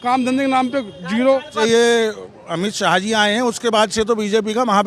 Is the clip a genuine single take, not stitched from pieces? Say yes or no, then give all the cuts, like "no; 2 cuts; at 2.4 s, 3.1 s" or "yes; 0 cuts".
no; 1 cut; at 1.5 s